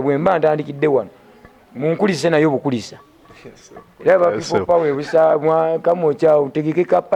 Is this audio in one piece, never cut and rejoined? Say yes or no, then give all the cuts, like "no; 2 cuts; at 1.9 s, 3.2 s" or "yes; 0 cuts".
yes; 0 cuts